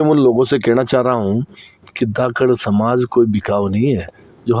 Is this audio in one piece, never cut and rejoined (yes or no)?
yes